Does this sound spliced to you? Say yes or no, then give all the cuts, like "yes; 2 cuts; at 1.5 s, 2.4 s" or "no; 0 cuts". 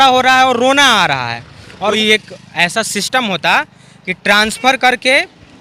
yes; 1 cut; at 1.9 s